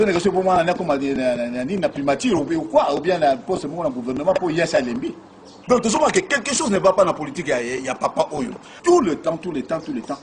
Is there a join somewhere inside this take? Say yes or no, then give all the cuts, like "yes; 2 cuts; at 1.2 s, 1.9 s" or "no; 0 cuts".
yes; 2 cuts; at 5.5 s, 8.6 s